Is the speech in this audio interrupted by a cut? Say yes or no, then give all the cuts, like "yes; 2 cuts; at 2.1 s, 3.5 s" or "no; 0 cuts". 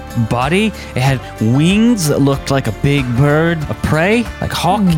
yes; 1 cut; at 3.7 s